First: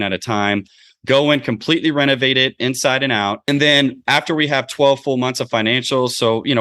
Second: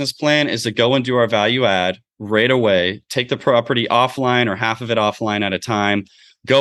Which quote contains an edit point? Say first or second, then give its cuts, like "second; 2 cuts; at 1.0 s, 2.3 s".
first; 1 cut; at 3.4 s